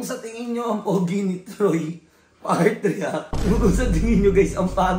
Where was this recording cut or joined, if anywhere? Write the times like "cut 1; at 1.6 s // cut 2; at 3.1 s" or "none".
cut 1; at 3.4 s